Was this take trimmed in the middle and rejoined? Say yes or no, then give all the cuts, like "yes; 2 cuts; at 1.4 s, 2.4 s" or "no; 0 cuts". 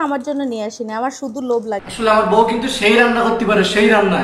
yes; 1 cut; at 1.9 s